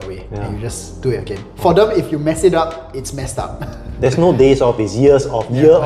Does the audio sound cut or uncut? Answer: uncut